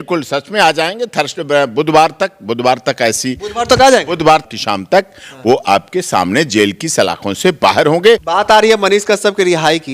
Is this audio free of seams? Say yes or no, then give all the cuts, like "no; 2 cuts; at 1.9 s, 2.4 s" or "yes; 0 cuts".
no; 2 cuts; at 4.5 s, 8.2 s